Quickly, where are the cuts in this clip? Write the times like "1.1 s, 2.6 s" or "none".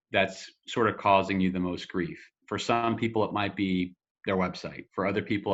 none